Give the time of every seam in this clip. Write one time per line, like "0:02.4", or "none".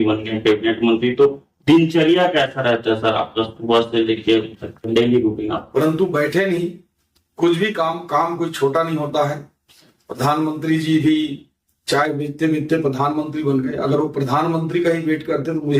0:05.6

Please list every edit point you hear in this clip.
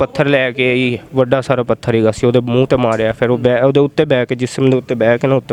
none

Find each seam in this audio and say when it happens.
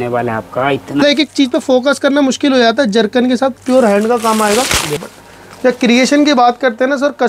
0:01.0
0:05.0

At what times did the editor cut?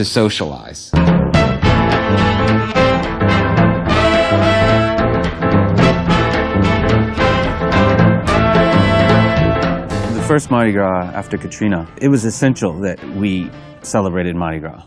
none

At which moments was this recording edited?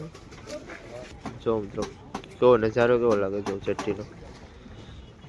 0:01.1

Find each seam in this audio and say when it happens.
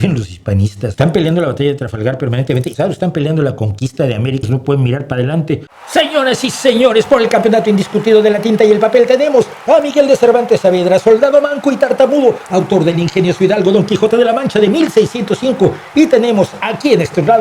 0:00.9
0:02.7
0:04.5
0:05.8

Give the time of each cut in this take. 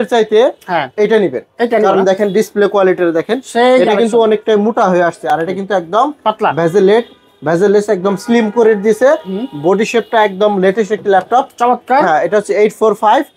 none

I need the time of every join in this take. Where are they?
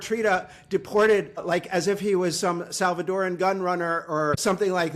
none

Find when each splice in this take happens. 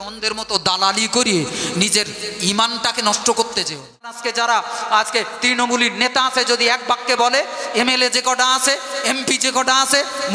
0:04.2

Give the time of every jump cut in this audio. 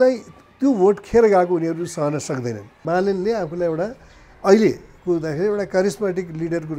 0:02.8

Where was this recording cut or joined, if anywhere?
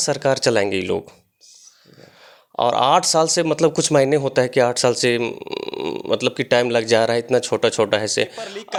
none

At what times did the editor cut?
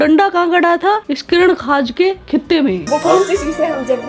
0:02.8

